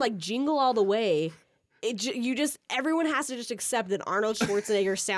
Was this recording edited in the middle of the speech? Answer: no; 0 cuts

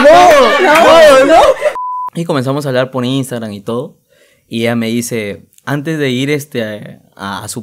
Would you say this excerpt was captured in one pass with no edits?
no; 1 cut; at 1.7 s

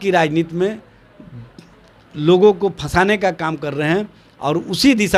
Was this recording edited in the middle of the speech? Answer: no; 0 cuts

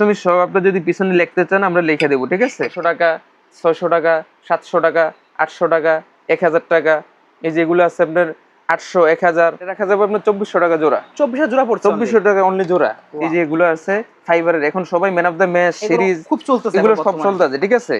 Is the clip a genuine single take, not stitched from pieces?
no; 3 cuts; at 2.8 s, 9.7 s, 13.2 s

